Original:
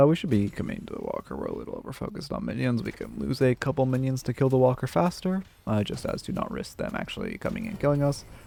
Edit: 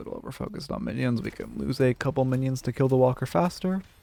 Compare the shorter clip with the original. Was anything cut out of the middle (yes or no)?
no